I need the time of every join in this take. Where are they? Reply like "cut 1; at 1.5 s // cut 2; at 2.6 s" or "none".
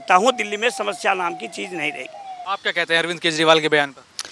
cut 1; at 2.3 s